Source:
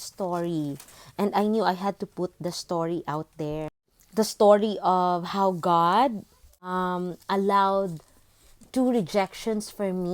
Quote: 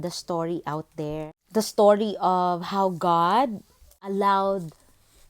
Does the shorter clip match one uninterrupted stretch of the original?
no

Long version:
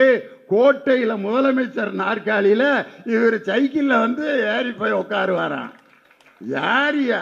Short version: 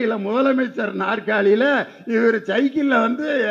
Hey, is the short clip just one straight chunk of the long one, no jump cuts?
yes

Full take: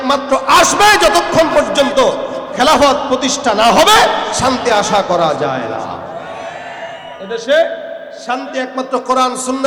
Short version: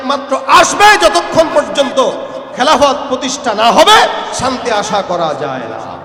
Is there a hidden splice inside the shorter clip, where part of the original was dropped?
no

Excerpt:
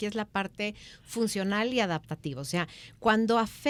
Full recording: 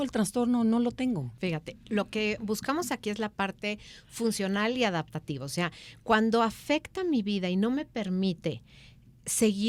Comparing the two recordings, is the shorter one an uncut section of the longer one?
yes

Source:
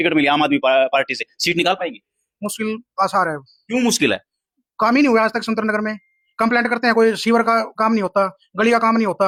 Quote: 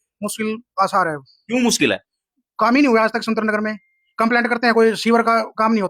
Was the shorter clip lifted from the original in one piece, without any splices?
yes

